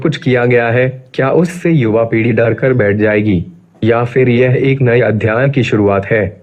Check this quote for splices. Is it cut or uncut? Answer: uncut